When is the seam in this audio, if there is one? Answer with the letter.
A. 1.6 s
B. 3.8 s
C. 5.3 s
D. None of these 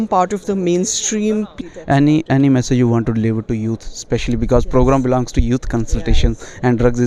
A